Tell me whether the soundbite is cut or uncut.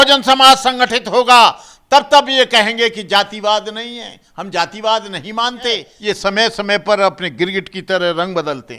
cut